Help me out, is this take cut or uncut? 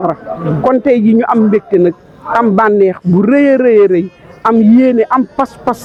uncut